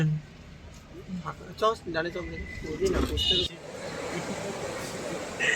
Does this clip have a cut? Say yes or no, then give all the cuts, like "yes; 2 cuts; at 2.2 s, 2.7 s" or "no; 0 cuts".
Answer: yes; 1 cut; at 3.5 s